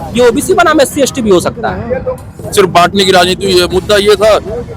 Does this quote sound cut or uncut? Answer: cut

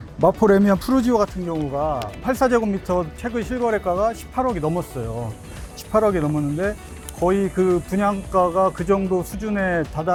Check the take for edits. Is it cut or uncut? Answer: uncut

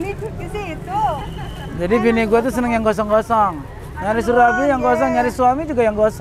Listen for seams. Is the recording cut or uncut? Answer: uncut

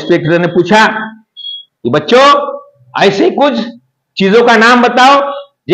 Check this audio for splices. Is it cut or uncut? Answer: uncut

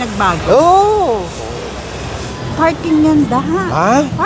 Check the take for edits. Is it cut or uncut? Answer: cut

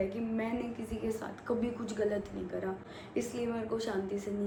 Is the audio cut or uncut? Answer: uncut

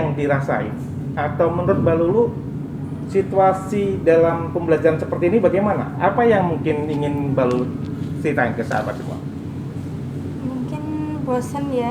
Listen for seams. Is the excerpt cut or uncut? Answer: uncut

